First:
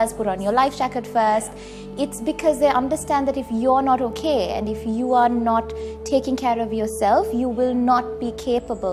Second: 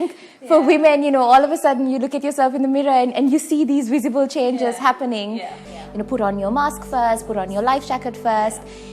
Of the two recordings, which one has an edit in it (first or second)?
second